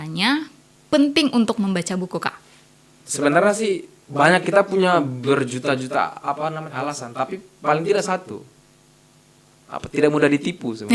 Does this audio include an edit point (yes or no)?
no